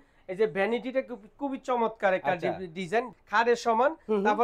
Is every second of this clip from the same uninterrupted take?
no; 1 cut; at 3.1 s

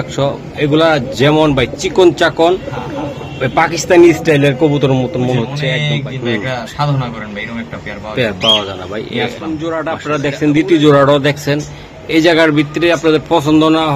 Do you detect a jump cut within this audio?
yes; 2 cuts; at 5.7 s, 9.6 s

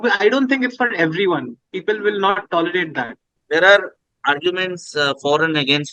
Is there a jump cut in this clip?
yes; 1 cut; at 3.4 s

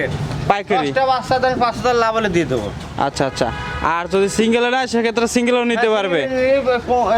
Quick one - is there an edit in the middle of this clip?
no; 0 cuts

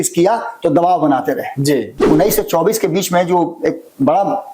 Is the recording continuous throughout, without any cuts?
no; 1 cut; at 1.9 s

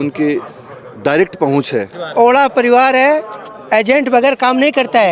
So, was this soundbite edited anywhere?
yes; 1 cut; at 2.0 s

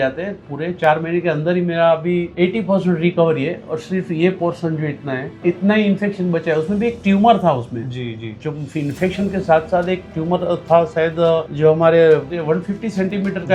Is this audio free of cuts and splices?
no; 4 cuts; at 2.3 s, 5.3 s, 11.5 s, 12.3 s

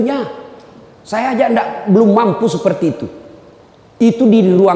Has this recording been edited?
no; 0 cuts

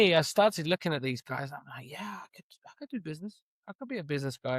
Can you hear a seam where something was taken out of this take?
no; 0 cuts

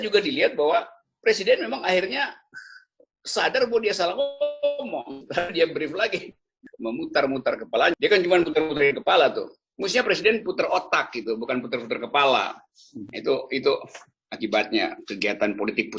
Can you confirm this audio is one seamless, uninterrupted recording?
no; 1 cut; at 6.6 s

